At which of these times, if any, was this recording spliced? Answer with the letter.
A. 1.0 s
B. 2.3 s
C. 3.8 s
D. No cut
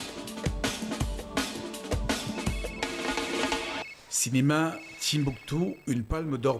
A